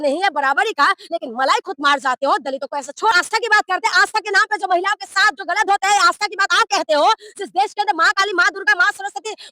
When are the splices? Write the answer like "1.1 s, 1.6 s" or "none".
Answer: 3.2 s